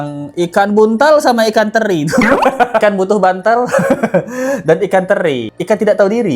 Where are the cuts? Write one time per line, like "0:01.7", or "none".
0:02.8